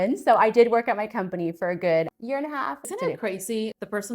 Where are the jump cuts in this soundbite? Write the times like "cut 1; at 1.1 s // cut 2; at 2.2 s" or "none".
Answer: cut 1; at 2.9 s